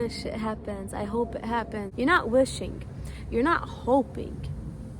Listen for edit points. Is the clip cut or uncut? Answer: cut